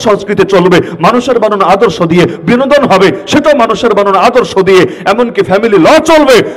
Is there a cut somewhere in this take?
no; 0 cuts

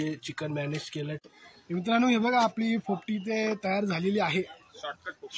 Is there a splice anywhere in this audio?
yes; 1 cut; at 1.2 s

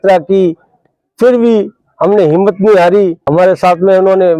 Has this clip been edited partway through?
yes; 1 cut; at 3.4 s

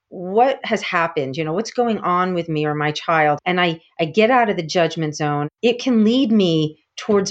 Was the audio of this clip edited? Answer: yes; 2 cuts; at 3.4 s, 5.5 s

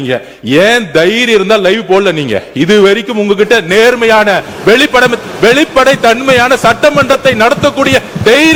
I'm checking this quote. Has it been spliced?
no; 0 cuts

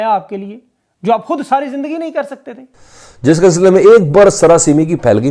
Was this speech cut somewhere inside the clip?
yes; 1 cut; at 2.5 s

